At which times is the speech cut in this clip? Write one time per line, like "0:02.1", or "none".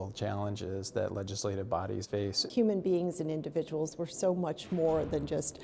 0:02.4